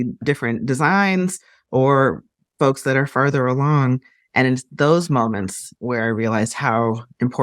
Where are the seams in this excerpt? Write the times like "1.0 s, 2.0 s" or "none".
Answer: none